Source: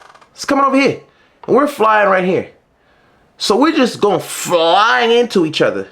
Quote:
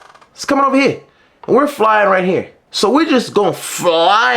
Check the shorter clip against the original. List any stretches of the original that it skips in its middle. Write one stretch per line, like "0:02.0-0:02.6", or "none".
0:02.6-0:03.3